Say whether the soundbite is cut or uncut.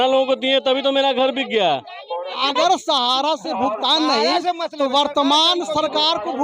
cut